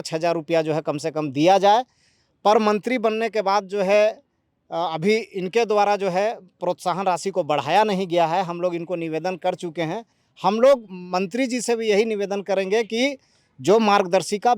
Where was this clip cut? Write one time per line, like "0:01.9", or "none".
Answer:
none

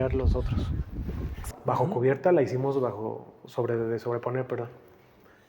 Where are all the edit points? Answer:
0:01.5

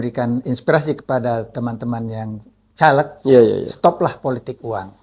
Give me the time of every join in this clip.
none

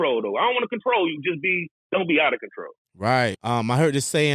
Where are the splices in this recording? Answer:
0:03.4

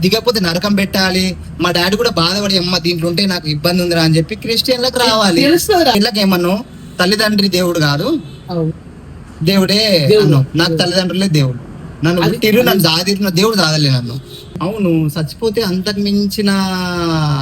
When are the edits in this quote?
0:05.9
0:14.5

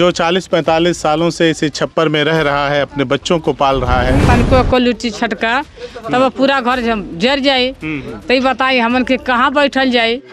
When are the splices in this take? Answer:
0:04.2

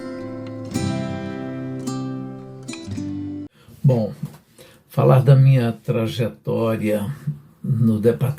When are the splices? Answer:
0:03.6

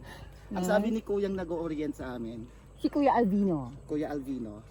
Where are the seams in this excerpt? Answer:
none

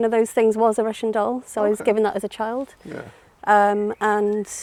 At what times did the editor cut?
none

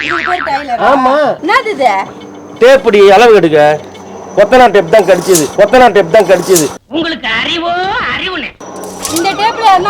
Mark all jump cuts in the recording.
0:01.4

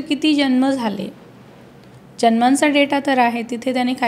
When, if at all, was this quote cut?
none

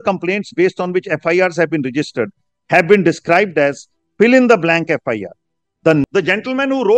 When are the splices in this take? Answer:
0:06.0

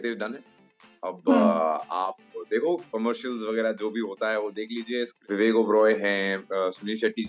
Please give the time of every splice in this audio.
0:05.1

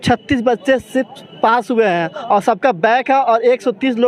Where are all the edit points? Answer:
none

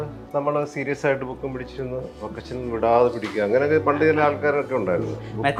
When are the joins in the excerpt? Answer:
none

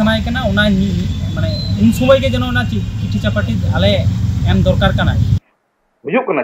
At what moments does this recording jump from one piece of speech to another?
0:05.3

